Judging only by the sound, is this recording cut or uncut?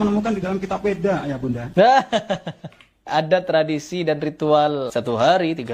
cut